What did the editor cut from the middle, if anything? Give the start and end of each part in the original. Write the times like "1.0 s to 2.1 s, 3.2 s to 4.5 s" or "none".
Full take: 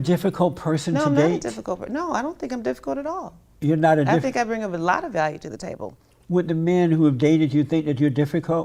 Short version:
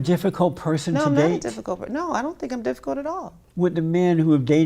3.4 s to 6.1 s